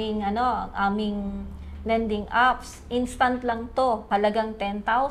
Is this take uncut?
no; 1 cut; at 4.0 s

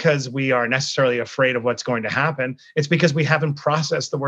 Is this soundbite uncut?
yes; 0 cuts

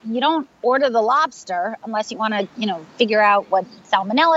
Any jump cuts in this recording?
no; 0 cuts

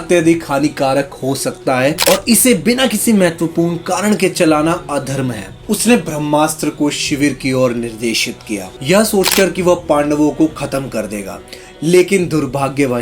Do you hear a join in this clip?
no; 0 cuts

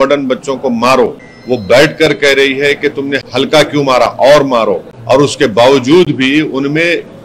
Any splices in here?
yes; 3 cuts; at 1.3 s, 3.2 s, 4.9 s

